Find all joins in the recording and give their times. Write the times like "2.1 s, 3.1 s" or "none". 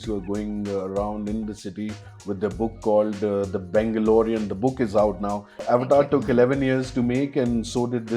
5.5 s